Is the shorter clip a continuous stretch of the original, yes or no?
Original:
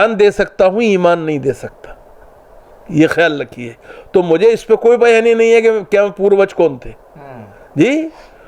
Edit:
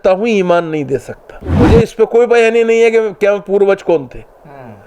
no